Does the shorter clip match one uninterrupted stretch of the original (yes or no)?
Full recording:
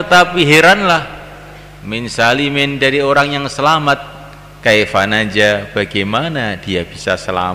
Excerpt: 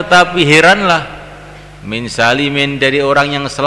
yes